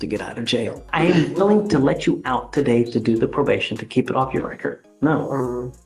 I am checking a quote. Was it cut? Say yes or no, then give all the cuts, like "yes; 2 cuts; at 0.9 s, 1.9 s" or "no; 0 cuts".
yes; 2 cuts; at 0.8 s, 4.9 s